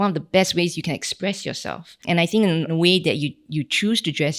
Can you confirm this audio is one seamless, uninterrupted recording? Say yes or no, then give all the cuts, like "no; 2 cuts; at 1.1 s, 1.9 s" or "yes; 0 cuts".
yes; 0 cuts